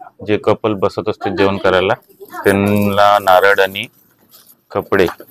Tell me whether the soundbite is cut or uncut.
uncut